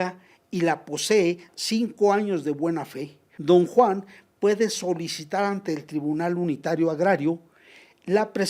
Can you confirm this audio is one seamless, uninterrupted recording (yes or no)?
no